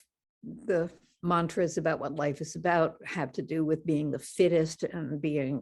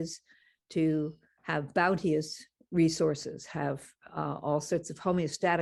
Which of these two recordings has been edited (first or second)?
first